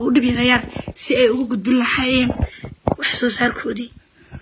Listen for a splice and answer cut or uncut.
cut